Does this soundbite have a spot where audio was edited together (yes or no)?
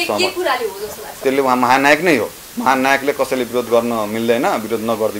yes